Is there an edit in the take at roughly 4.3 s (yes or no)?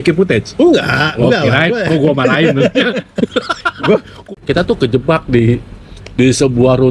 yes